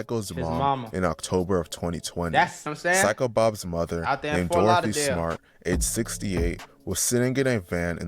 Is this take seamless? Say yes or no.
no